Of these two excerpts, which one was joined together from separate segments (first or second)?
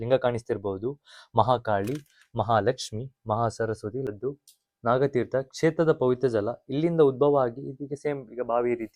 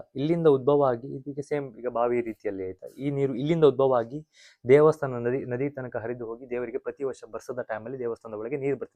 first